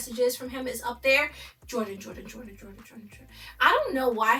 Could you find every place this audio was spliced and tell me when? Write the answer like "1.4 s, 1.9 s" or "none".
none